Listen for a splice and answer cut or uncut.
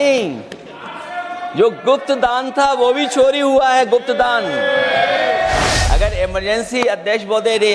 cut